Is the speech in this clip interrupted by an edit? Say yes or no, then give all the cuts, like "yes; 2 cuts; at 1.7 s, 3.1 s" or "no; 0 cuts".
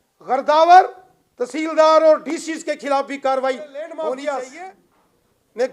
yes; 1 cut; at 3.9 s